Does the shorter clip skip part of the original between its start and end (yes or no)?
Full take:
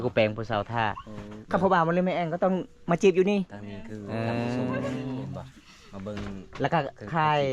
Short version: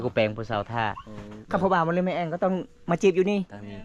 no